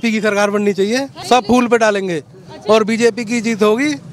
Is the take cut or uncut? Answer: cut